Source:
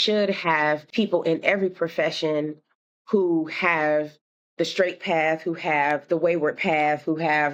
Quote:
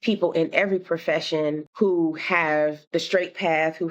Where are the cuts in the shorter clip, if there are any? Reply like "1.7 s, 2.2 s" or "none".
1.7 s, 2.8 s